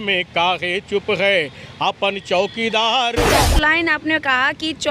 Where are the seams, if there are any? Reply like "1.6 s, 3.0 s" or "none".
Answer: 3.3 s